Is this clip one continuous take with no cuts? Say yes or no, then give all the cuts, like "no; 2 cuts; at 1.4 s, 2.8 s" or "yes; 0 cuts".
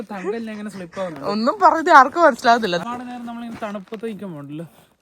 no; 1 cut; at 2.8 s